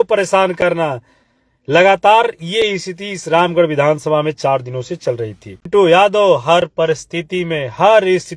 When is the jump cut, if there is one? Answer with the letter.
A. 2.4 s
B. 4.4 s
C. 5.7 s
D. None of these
C